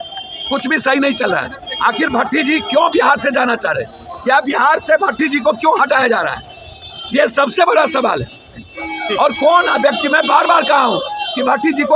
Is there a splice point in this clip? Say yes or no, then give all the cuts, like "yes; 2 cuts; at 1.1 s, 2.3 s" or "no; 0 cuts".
no; 0 cuts